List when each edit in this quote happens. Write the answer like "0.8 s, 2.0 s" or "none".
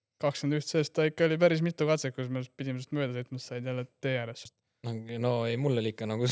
4.5 s

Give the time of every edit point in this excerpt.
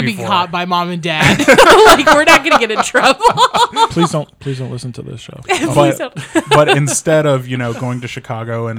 none

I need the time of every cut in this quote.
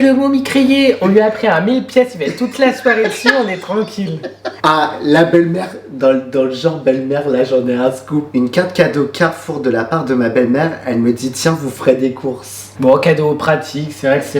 none

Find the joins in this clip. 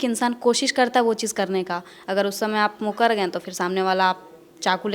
none

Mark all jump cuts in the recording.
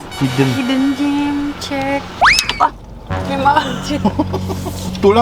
2.1 s

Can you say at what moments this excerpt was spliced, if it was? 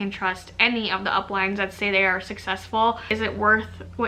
3.1 s

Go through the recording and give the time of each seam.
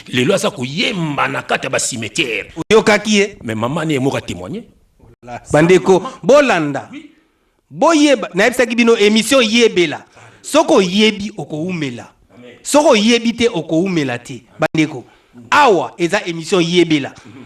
none

